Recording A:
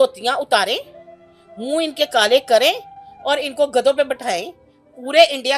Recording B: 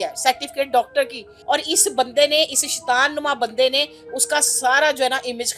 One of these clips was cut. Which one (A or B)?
B